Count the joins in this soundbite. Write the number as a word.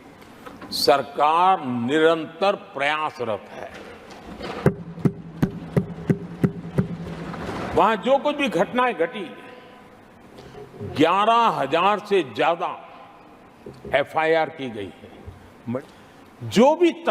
one